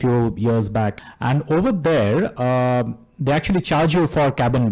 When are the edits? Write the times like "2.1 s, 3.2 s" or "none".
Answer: 1.0 s